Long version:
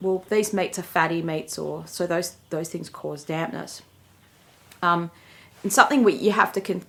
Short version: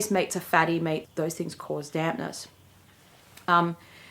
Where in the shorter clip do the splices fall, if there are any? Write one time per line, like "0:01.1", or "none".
0:01.1